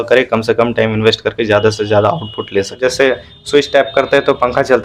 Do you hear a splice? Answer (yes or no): yes